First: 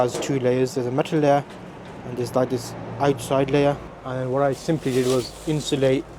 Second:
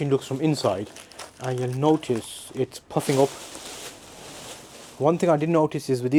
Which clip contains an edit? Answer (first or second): first